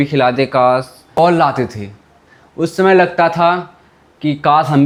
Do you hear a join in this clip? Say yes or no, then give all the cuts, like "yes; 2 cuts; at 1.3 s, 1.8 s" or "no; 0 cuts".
no; 0 cuts